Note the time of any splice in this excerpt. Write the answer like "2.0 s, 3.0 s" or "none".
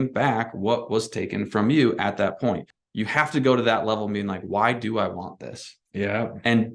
2.8 s

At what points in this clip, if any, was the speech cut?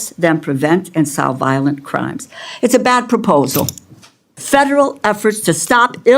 4.2 s

